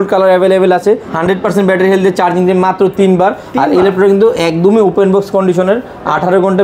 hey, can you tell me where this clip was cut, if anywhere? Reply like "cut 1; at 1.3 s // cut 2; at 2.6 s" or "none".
cut 1; at 1.1 s

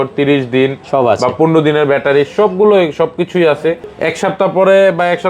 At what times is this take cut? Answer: cut 1; at 3.9 s

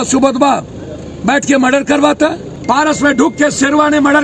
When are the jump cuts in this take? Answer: cut 1; at 2.5 s

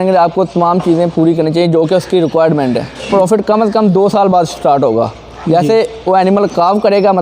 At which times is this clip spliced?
cut 1; at 3.1 s

